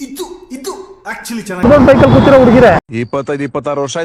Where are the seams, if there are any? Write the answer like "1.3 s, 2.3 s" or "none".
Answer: 1.6 s, 2.8 s